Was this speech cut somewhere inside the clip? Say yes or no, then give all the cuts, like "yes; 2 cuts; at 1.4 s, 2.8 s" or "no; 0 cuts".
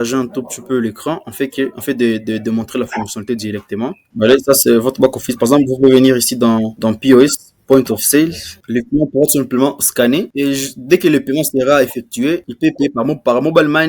yes; 2 cuts; at 4.0 s, 8.6 s